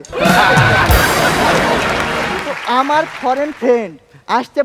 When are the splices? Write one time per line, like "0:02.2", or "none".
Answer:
0:02.5